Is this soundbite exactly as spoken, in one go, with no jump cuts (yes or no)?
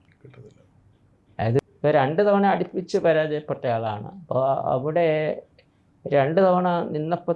no